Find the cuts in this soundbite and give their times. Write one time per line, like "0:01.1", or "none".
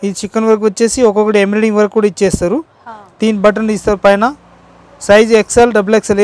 none